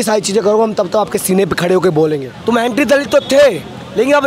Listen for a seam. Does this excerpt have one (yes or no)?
yes